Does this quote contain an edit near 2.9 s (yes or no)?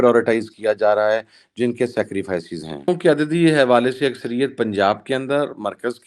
yes